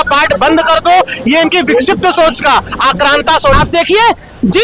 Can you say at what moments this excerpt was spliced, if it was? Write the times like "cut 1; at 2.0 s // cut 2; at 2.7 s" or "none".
cut 1; at 3.6 s